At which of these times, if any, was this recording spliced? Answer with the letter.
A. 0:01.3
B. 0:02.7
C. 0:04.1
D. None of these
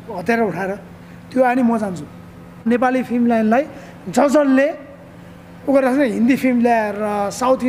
B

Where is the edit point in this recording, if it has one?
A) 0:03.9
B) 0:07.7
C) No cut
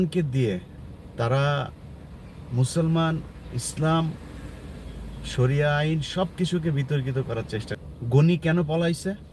B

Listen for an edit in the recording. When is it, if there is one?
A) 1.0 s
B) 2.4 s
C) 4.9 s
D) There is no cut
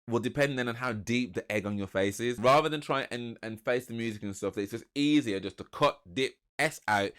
B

